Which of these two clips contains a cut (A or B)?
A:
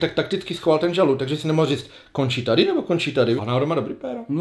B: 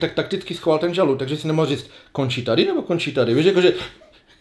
A